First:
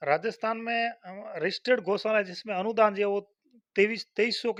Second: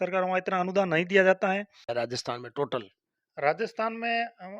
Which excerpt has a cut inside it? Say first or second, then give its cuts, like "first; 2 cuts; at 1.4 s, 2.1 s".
second; 1 cut; at 1.9 s